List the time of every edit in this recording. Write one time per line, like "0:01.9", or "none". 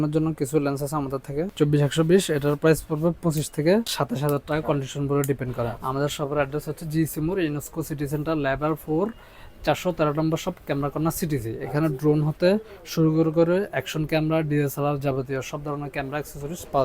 0:01.5
0:04.0
0:05.8